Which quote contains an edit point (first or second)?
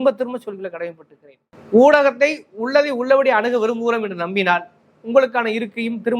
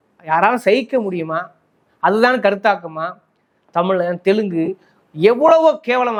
first